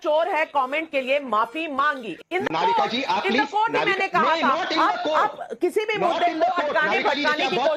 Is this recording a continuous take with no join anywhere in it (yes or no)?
yes